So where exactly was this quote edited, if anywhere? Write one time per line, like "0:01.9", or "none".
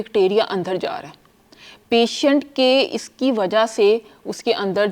none